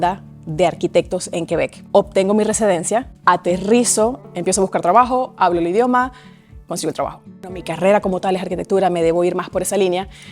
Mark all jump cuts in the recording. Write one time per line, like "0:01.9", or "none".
0:01.9
0:03.1
0:04.2
0:07.6